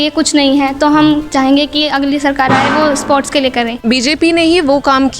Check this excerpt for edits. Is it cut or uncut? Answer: cut